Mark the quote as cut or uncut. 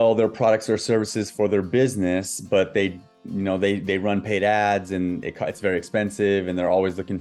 uncut